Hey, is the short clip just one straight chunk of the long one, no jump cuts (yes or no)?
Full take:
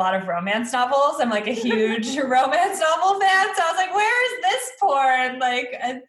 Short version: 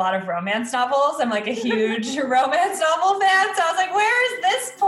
yes